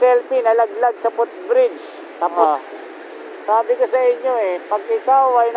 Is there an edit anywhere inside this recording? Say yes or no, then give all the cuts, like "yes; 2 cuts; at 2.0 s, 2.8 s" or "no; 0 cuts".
yes; 1 cut; at 2.4 s